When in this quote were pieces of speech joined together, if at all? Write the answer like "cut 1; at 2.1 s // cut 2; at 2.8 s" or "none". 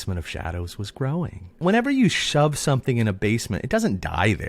cut 1; at 1.6 s

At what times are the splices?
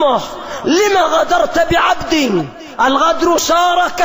cut 1; at 2.6 s

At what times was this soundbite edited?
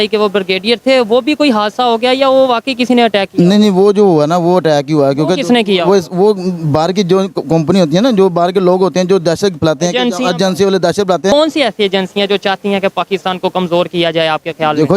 cut 1; at 11.3 s

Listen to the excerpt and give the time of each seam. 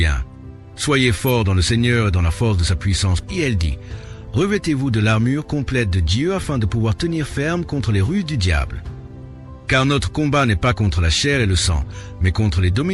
cut 1; at 3.2 s

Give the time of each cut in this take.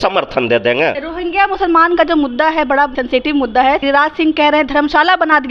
cut 1; at 1.0 s // cut 2; at 3.8 s

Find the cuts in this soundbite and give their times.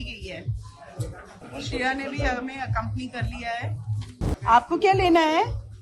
cut 1; at 1.4 s // cut 2; at 4.2 s

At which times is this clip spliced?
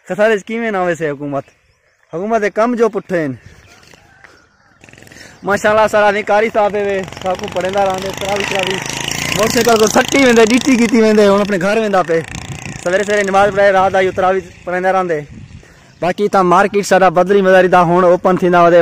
none

